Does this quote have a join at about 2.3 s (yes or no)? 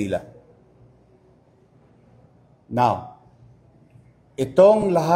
no